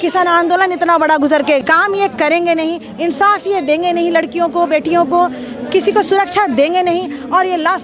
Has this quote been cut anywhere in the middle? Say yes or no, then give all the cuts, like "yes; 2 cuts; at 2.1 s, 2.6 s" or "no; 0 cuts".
yes; 1 cut; at 1.6 s